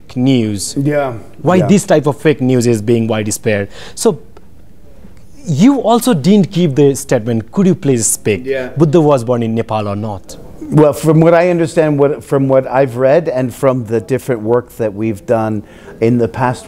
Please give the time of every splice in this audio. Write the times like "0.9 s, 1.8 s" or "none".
none